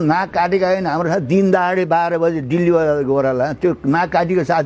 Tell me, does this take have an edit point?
no; 0 cuts

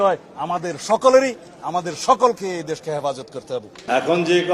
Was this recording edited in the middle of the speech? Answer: no; 0 cuts

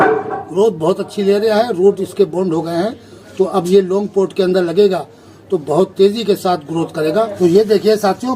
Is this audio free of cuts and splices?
no; 1 cut; at 7.3 s

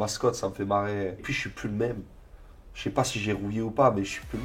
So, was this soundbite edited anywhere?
yes; 1 cut; at 1.3 s

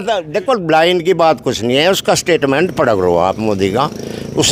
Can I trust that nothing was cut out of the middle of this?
yes; 0 cuts

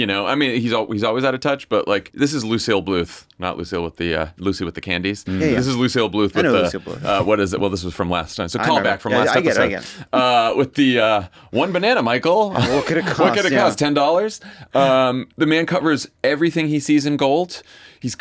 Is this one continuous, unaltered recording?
no; 1 cut; at 2.1 s

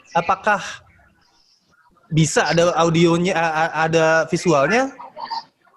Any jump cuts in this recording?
no; 0 cuts

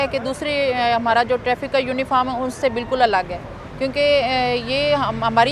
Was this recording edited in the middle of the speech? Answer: no; 0 cuts

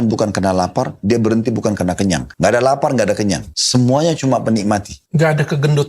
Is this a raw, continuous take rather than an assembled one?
no; 3 cuts; at 2.3 s, 3.5 s, 5.0 s

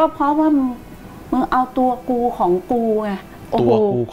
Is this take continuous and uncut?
yes; 0 cuts

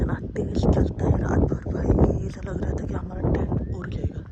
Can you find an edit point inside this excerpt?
no; 0 cuts

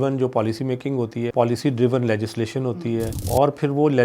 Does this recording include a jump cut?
yes; 2 cuts; at 1.3 s, 3.2 s

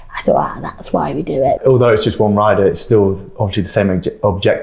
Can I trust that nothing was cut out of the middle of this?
no; 1 cut; at 1.6 s

